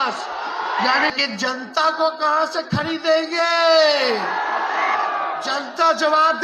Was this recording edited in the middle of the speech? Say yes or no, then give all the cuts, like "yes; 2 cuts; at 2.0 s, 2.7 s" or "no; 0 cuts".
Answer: yes; 1 cut; at 1.1 s